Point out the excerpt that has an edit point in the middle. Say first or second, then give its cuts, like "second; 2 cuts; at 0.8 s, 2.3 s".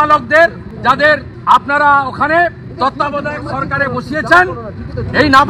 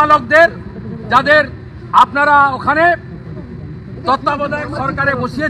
first; 2 cuts; at 1.0 s, 2.6 s